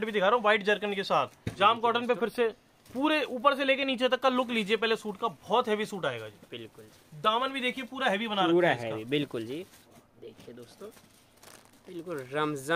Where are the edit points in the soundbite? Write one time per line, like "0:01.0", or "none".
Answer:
0:01.4
0:09.8